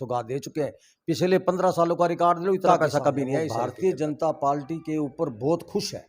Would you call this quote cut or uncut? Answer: cut